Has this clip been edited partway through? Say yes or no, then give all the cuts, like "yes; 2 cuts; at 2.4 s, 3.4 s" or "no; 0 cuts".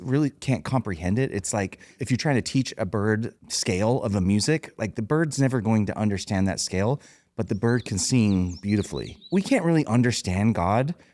yes; 3 cuts; at 2.0 s, 3.4 s, 9.2 s